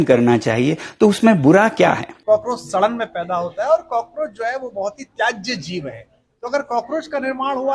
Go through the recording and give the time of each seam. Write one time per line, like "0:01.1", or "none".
0:02.1